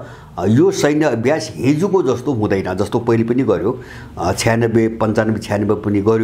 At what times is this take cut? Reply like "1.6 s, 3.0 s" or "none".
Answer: none